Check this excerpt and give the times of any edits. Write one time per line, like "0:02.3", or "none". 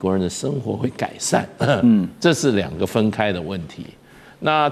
none